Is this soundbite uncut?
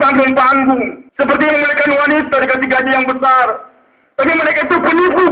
no; 1 cut; at 1.0 s

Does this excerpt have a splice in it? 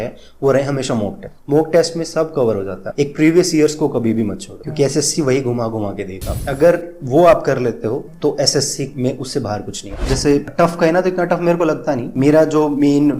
yes; 2 cuts; at 6.3 s, 10.0 s

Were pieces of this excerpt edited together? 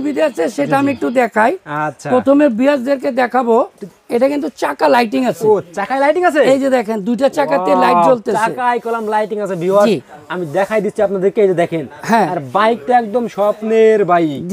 no; 0 cuts

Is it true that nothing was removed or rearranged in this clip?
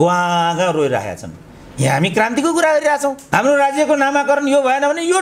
no; 1 cut; at 3.2 s

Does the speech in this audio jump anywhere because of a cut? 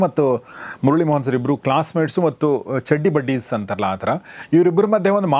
no; 0 cuts

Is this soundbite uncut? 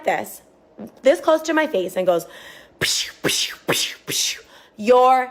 yes; 0 cuts

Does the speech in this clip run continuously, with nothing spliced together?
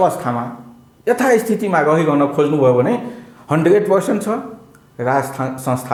yes; 0 cuts

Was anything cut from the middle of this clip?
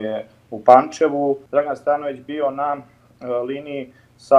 yes; 1 cut; at 1.4 s

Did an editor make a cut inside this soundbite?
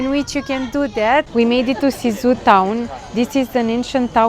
yes; 1 cut; at 1.3 s

